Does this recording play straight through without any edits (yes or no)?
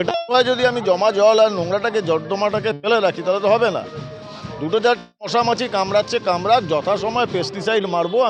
yes